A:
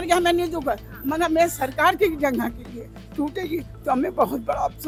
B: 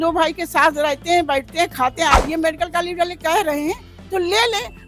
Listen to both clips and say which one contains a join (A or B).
B